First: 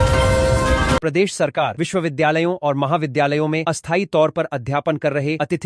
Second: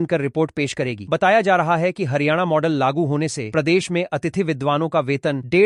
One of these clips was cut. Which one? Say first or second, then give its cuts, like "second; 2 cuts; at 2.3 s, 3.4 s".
first; 1 cut; at 1.0 s